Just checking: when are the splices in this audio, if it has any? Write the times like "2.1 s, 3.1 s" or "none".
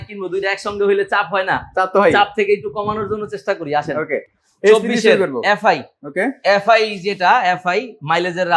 none